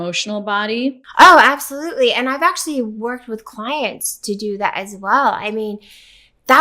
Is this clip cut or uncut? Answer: uncut